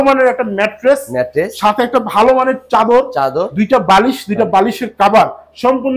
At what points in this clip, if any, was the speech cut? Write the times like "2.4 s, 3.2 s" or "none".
none

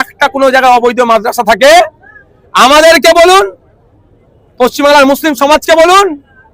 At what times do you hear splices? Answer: none

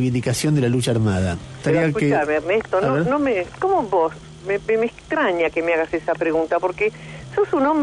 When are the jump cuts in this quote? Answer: none

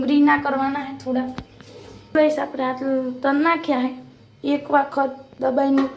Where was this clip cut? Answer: 2.1 s

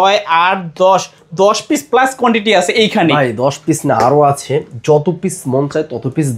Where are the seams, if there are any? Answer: none

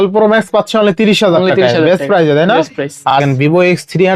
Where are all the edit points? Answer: 3.1 s

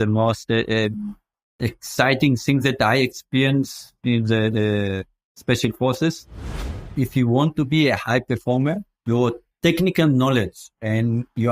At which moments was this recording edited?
6.5 s

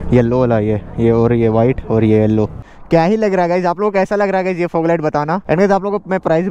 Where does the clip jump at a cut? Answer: 2.8 s, 5.5 s

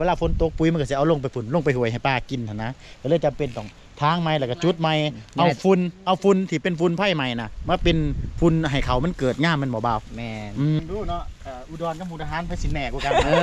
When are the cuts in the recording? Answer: 10.8 s

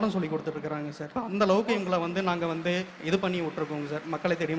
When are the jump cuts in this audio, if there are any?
1.0 s, 2.9 s

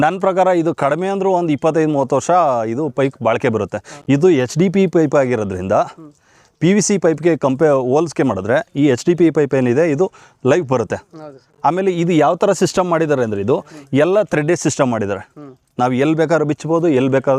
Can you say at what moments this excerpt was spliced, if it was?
none

